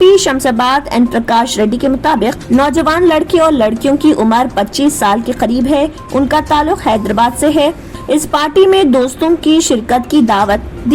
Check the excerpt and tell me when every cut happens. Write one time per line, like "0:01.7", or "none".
0:02.4

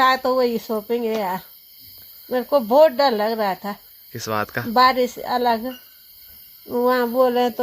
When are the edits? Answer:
none

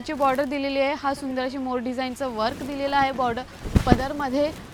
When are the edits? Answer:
none

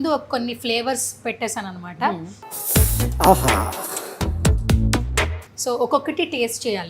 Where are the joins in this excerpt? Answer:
none

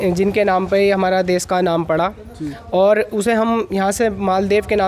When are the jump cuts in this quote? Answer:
none

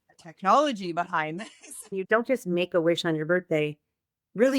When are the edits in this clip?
0:02.0

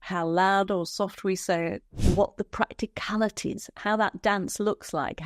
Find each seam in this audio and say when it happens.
0:01.9

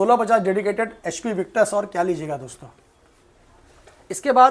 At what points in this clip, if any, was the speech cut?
none

